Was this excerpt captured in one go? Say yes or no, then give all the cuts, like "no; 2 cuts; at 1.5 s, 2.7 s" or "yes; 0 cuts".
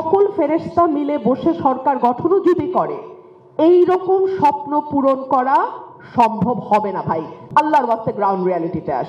no; 1 cut; at 7.4 s